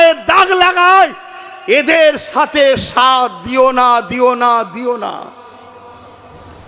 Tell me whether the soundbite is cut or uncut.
uncut